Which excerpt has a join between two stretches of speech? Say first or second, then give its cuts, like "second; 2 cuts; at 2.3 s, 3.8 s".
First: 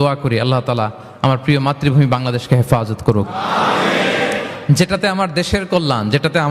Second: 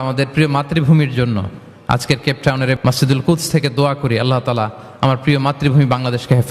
second; 1 cut; at 2.8 s